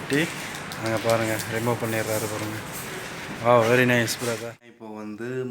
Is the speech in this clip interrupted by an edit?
yes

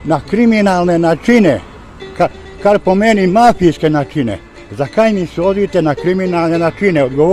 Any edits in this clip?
no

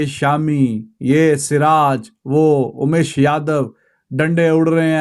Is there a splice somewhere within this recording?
no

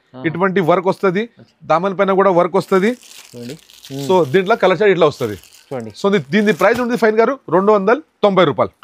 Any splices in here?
no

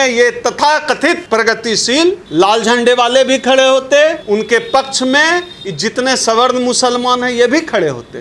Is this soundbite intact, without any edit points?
no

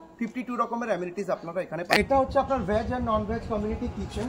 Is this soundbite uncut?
no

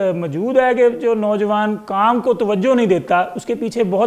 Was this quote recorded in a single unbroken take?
yes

